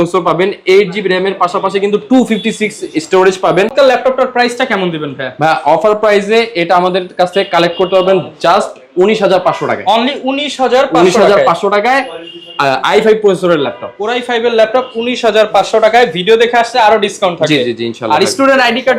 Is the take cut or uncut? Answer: uncut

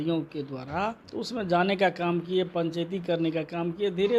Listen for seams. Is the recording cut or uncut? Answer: cut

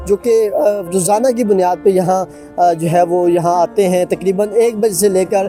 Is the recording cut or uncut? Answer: uncut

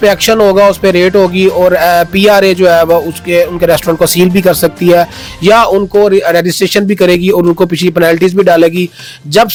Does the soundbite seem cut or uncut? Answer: uncut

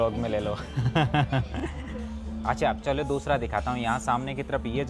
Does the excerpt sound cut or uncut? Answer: uncut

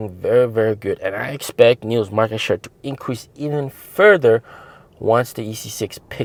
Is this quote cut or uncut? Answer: uncut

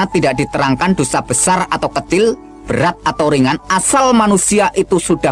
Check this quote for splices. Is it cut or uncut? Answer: uncut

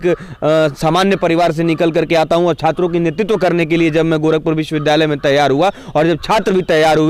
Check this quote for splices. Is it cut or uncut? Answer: uncut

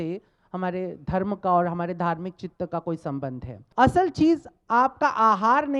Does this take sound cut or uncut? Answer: cut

